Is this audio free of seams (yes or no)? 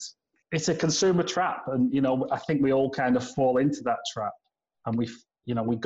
yes